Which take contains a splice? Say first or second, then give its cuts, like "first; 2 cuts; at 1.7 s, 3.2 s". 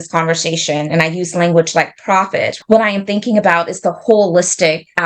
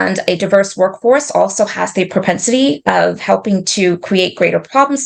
first; 1 cut; at 2.5 s